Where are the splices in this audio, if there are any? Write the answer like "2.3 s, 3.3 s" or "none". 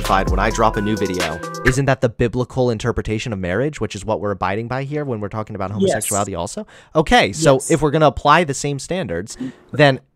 1.5 s